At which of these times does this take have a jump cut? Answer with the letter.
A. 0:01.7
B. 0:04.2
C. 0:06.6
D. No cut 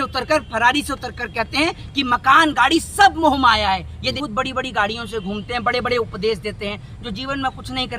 B